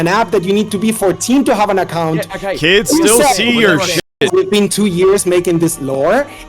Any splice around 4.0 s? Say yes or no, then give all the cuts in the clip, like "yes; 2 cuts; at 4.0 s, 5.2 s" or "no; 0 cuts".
yes; 1 cut; at 4.0 s